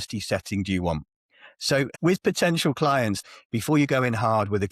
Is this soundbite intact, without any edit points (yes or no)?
no